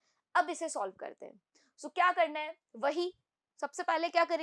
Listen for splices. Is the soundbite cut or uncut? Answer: uncut